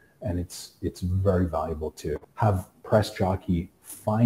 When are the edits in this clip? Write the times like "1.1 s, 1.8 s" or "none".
2.3 s